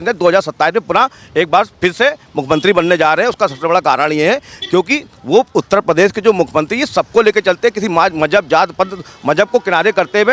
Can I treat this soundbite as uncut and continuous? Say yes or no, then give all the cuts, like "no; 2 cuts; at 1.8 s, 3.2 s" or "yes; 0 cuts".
yes; 0 cuts